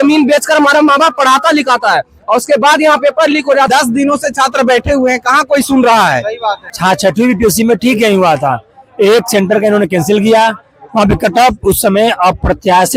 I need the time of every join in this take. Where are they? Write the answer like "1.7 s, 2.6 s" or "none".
3.7 s, 6.7 s